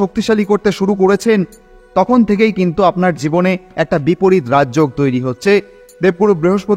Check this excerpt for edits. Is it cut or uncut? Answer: uncut